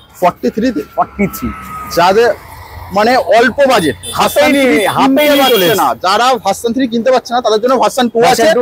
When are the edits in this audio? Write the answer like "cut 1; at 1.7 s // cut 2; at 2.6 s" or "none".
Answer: none